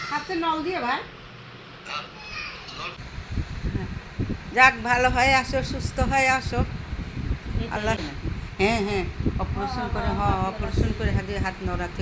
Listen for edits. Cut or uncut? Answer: cut